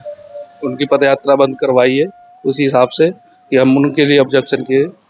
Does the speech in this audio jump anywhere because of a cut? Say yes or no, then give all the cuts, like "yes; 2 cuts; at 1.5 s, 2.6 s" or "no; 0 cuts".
no; 0 cuts